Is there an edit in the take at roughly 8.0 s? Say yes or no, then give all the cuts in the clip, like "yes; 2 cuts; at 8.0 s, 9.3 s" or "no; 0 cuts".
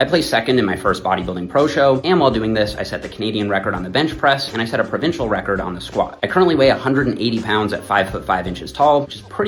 no; 0 cuts